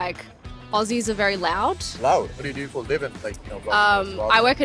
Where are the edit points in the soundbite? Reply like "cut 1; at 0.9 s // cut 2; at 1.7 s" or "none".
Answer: cut 1; at 2.5 s